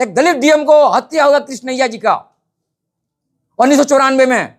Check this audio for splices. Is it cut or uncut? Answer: uncut